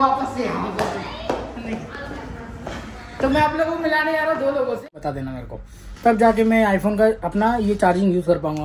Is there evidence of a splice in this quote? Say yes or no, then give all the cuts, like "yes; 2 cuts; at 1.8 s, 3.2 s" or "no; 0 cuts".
yes; 1 cut; at 5.1 s